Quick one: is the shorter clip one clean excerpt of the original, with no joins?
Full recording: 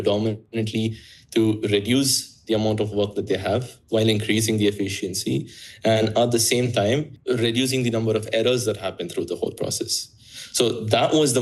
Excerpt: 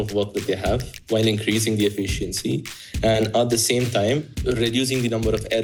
yes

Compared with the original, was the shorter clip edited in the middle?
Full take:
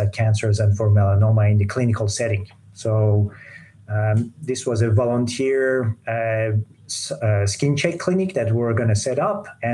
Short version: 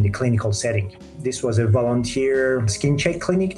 yes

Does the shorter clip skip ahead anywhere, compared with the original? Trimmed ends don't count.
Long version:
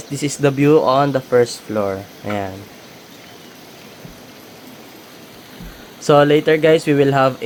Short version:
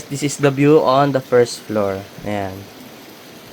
yes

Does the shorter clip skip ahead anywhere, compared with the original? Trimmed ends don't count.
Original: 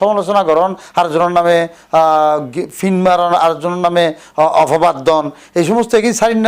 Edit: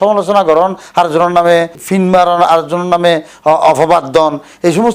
yes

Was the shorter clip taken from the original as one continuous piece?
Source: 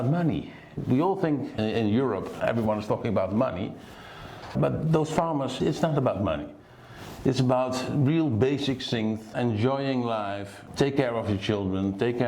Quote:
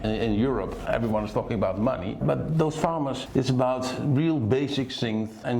no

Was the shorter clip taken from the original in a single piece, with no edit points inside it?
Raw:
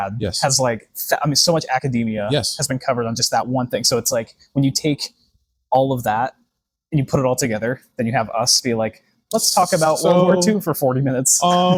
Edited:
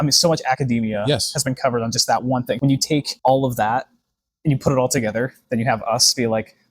no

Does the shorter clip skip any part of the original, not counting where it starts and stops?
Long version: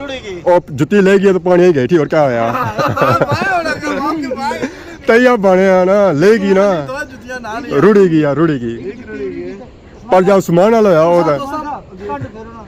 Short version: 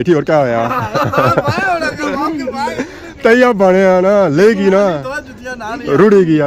no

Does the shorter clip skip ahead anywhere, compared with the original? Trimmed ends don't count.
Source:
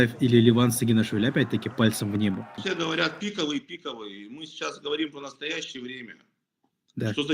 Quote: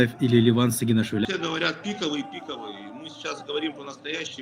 yes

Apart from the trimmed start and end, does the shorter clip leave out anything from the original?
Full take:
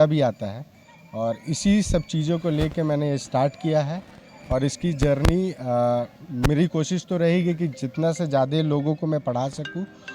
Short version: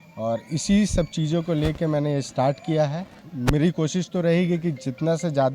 yes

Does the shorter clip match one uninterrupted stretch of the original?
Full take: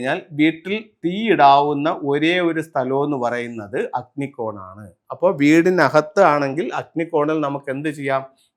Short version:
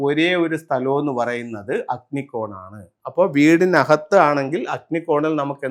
yes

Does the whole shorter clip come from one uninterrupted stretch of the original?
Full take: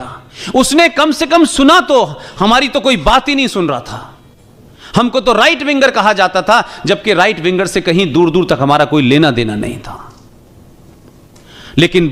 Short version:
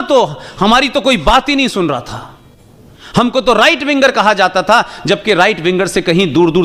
yes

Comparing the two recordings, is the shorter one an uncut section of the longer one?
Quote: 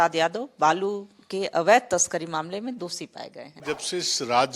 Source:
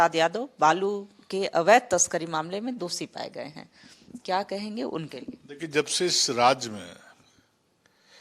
no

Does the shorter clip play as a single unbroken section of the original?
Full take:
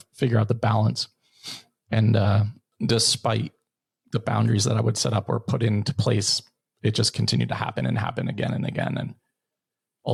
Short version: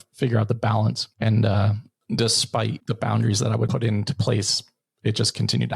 no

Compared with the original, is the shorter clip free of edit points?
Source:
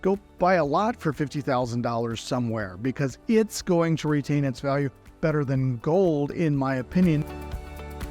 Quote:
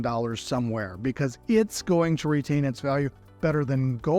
yes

